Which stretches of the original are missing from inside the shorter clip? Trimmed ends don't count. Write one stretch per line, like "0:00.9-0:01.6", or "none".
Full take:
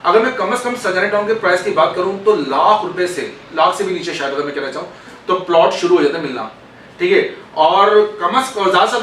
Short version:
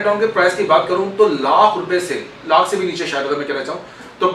none